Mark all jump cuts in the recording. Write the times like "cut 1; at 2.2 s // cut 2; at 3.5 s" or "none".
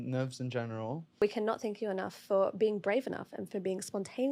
cut 1; at 1.2 s